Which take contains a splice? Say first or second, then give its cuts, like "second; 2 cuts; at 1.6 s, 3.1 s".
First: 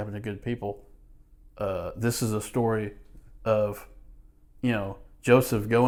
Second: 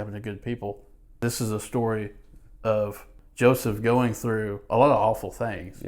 second; 2 cuts; at 1.1 s, 3.2 s